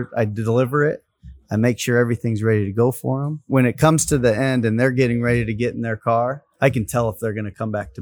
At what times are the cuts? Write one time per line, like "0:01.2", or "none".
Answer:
0:03.4
0:06.4